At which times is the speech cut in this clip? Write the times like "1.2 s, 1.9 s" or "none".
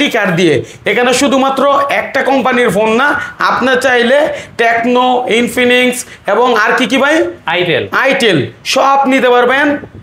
none

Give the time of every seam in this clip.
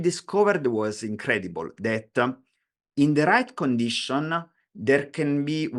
none

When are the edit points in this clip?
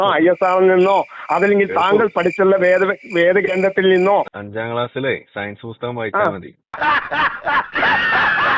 4.3 s

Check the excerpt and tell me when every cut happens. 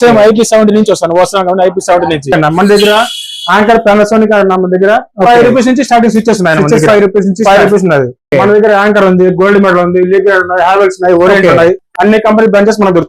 2.3 s

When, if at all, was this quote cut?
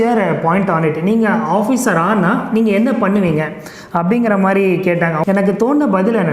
5.2 s

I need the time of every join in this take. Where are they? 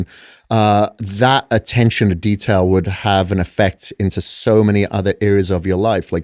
none

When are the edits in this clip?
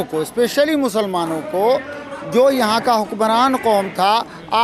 none

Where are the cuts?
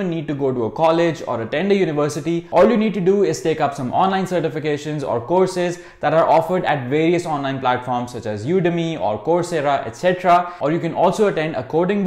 none

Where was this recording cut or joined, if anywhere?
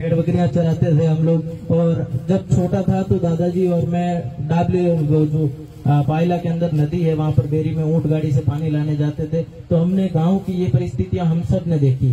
none

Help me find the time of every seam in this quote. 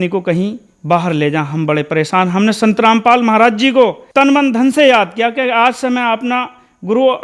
4.0 s

